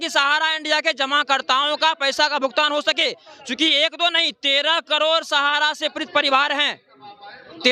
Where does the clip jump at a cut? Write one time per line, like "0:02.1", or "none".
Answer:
none